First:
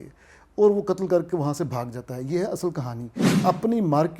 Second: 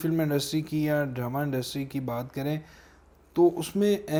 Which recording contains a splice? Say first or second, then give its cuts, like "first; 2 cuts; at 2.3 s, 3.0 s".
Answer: first; 1 cut; at 3.3 s